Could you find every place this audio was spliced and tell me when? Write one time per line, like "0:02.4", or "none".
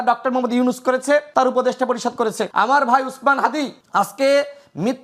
0:01.3
0:02.4
0:03.8